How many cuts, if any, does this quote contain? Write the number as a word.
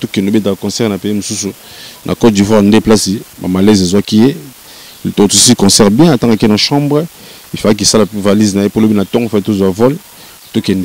zero